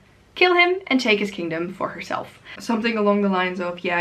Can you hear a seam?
yes; 1 cut; at 2.6 s

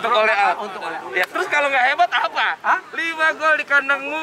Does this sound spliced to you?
no; 0 cuts

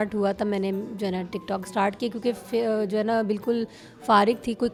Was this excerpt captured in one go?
yes; 0 cuts

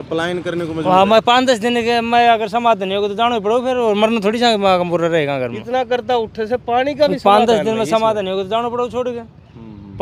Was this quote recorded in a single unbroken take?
yes; 0 cuts

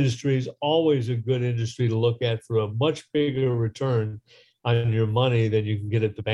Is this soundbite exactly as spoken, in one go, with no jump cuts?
yes; 0 cuts

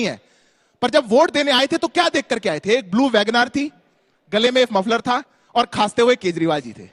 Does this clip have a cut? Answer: no; 0 cuts

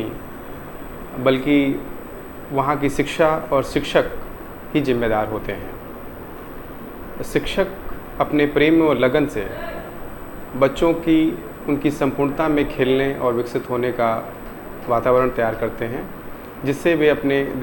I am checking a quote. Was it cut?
no; 0 cuts

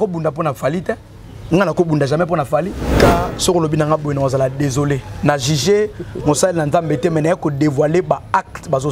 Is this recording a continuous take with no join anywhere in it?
no; 1 cut; at 2.9 s

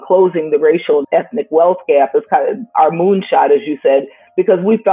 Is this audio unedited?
no; 1 cut; at 1.0 s

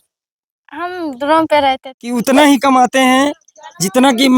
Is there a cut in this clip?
yes; 1 cut; at 2.0 s

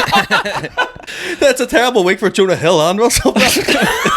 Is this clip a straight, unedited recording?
no; 1 cut; at 1.1 s

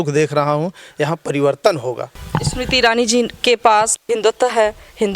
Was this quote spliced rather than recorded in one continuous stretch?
yes; 1 cut; at 2.1 s

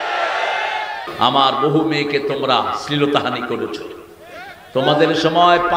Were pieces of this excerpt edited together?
yes; 1 cut; at 1.0 s

